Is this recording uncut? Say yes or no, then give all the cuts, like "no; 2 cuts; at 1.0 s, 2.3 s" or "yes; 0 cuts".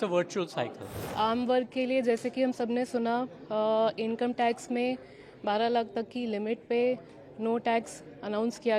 no; 1 cut; at 1.0 s